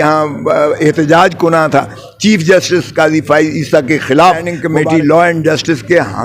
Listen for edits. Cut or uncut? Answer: cut